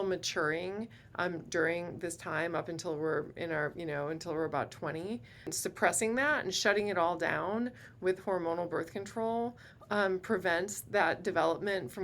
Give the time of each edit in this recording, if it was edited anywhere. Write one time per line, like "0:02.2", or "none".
0:05.6

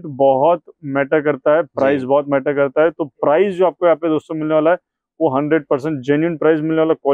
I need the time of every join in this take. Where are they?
none

